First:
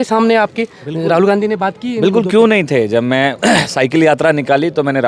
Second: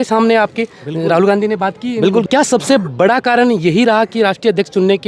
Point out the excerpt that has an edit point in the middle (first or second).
second